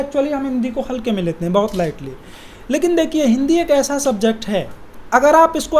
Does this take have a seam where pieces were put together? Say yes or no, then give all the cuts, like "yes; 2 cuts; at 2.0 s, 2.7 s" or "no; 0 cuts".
no; 0 cuts